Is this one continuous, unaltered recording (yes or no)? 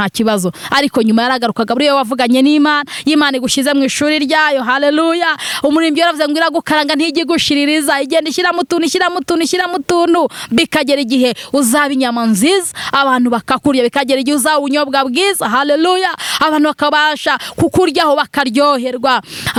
yes